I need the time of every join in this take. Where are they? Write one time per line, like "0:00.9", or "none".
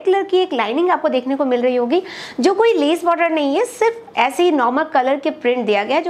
none